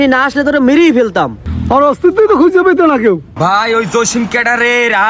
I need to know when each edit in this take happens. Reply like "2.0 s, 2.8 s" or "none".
3.3 s